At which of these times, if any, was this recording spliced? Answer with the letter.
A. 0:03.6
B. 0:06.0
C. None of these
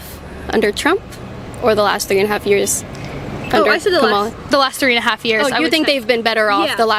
C